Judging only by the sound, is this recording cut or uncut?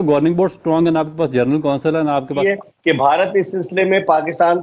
cut